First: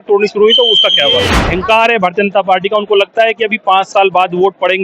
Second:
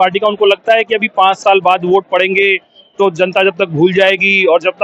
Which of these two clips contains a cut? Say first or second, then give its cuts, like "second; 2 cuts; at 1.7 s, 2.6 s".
first; 1 cut; at 1.4 s